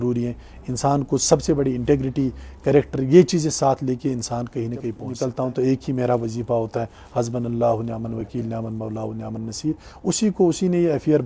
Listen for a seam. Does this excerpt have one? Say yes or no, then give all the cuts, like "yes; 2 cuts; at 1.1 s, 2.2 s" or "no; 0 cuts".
yes; 1 cut; at 5.1 s